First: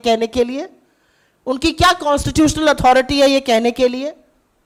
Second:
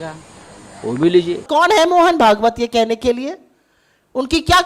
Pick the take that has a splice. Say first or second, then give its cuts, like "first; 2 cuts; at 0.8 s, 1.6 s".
second; 1 cut; at 1.4 s